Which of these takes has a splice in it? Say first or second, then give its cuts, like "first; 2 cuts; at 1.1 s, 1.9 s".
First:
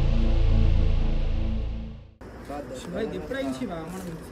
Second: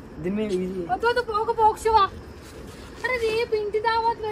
first; 1 cut; at 2.1 s